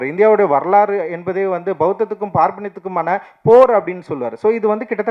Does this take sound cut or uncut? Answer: uncut